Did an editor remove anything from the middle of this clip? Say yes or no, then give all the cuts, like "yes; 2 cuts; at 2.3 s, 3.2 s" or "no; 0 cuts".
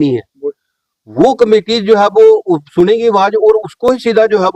no; 0 cuts